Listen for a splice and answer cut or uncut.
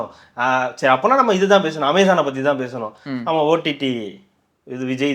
uncut